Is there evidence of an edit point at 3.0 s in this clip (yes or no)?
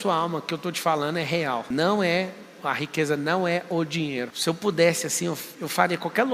no